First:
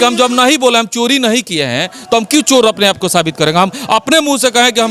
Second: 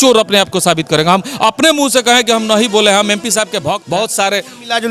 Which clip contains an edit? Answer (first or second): second